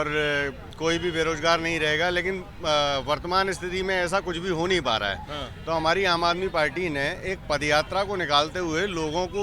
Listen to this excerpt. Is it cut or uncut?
uncut